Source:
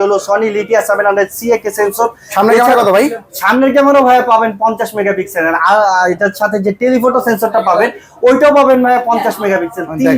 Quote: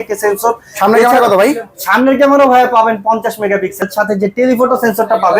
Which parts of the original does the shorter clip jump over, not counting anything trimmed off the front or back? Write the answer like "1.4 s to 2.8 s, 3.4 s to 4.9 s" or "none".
5.3 s to 6.2 s